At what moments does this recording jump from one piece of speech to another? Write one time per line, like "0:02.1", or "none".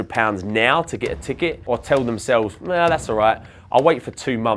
0:01.6